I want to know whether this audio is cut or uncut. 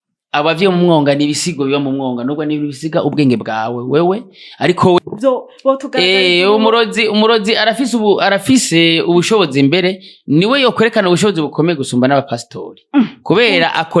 cut